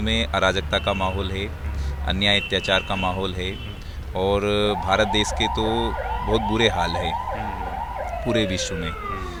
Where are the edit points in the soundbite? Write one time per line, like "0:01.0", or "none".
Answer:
none